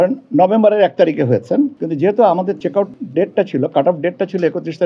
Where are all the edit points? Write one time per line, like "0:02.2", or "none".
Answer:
0:01.8
0:02.6